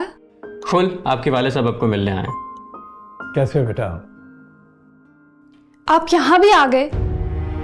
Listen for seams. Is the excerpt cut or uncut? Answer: uncut